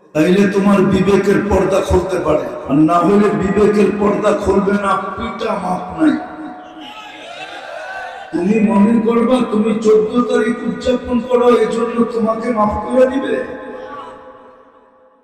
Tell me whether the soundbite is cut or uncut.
cut